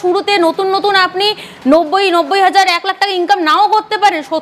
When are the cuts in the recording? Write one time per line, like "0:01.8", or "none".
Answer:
none